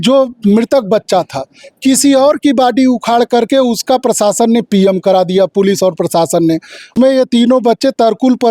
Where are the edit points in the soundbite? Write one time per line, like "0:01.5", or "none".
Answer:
0:06.9